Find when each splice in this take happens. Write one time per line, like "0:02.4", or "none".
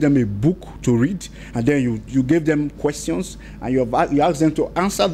none